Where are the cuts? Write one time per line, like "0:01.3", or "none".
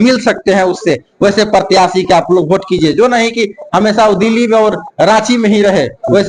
none